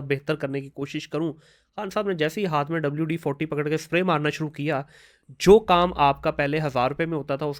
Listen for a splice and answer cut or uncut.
uncut